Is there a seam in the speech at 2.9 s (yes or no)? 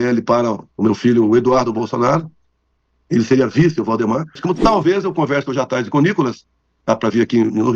no